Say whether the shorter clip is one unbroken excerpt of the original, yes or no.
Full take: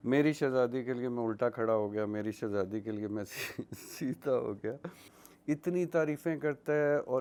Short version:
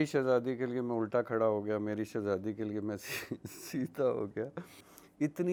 yes